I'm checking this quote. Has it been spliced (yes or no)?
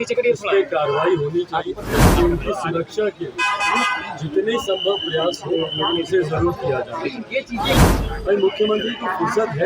yes